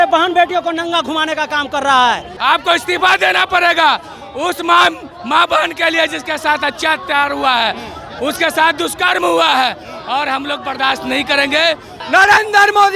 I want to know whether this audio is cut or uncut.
cut